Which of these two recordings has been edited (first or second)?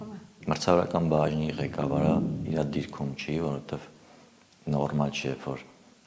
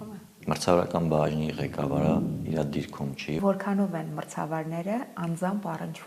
second